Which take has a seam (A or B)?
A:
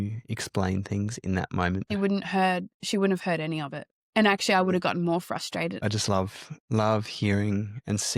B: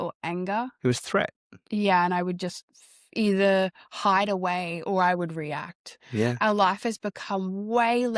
A